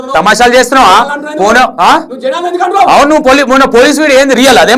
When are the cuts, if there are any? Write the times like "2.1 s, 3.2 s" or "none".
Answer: none